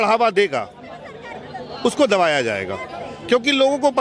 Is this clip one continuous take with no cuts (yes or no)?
yes